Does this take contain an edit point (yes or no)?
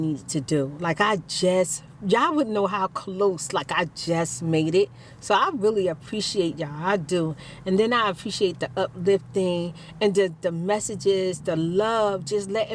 no